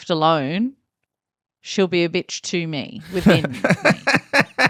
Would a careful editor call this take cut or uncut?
uncut